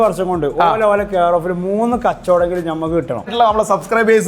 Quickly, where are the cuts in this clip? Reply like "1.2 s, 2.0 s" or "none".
3.3 s